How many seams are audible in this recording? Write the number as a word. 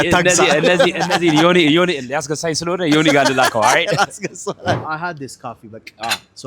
one